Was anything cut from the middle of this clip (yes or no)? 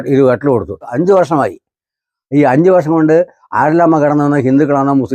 yes